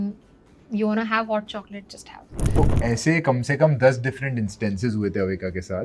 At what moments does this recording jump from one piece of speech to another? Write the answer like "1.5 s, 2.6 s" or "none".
2.6 s

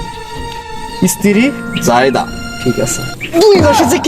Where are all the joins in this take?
2.9 s

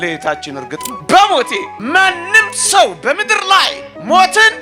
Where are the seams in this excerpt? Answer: 0.9 s

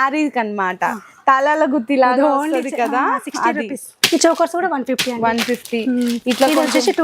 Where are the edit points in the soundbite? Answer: 3.9 s

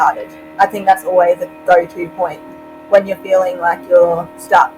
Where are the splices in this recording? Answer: none

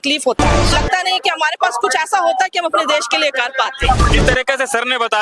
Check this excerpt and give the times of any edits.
0.7 s, 4.1 s

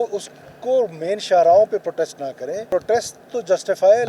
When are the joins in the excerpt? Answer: 2.7 s

